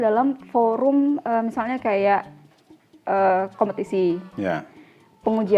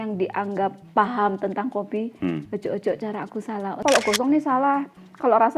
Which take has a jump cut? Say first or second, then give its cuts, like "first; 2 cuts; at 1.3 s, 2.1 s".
second; 1 cut; at 3.8 s